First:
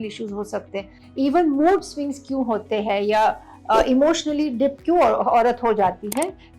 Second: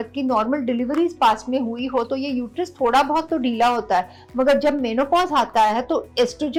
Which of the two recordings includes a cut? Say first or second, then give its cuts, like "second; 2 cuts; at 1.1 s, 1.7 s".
first; 1 cut; at 1.0 s